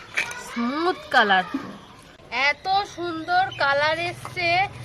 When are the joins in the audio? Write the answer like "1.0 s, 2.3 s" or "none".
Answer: none